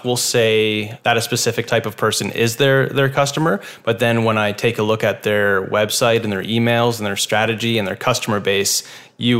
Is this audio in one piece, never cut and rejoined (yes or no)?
no